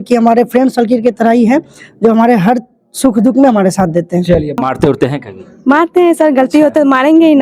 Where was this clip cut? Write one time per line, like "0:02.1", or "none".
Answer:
0:04.6